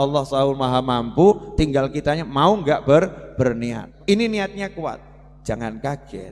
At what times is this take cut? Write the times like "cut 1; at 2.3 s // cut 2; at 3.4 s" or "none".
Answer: cut 1; at 3.8 s